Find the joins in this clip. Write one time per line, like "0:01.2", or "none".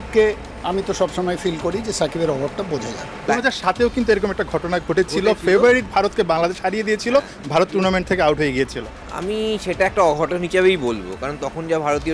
0:03.3